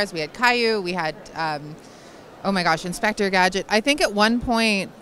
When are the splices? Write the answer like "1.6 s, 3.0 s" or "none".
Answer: none